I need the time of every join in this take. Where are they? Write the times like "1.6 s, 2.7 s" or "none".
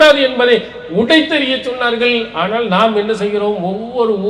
none